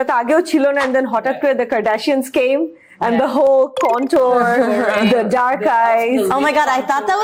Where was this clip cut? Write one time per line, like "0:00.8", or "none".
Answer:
none